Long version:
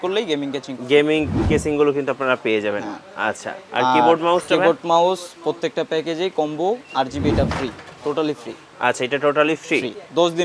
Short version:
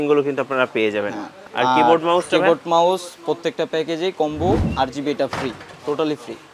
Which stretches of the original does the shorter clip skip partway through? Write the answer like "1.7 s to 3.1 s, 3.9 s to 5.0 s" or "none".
3.0 s to 3.5 s